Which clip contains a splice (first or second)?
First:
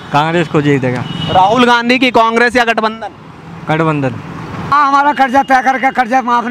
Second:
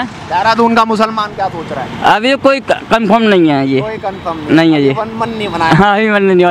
first